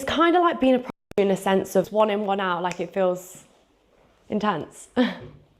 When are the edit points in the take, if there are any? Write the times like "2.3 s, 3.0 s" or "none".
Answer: 1.9 s

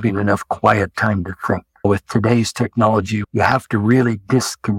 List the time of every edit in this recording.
1.8 s, 3.2 s

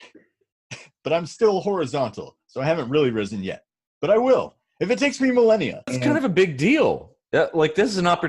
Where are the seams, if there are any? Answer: 5.9 s

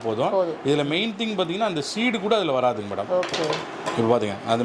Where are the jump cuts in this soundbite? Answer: none

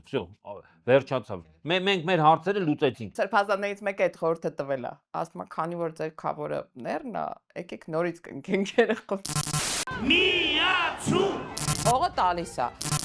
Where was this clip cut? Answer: 2.9 s, 9.3 s

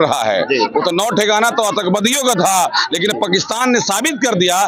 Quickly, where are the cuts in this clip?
none

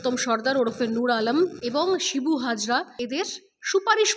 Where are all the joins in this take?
1.6 s, 2.9 s

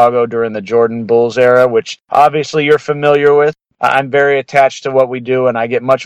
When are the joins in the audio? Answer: 2.0 s, 3.6 s

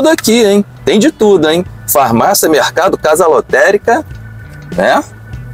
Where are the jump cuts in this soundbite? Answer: none

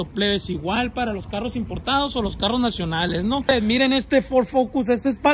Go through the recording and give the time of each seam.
3.4 s

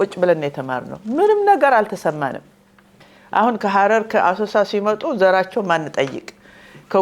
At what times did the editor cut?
none

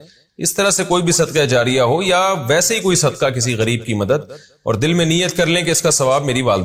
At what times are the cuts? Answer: none

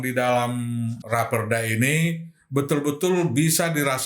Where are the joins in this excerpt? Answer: 1.0 s

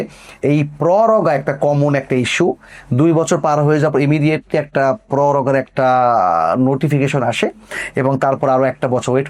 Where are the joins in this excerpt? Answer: none

